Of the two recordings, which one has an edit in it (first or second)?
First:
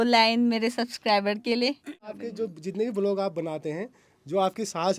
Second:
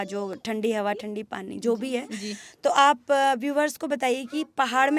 first